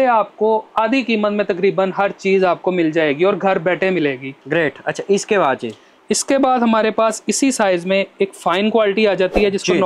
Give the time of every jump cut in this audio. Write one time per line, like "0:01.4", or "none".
none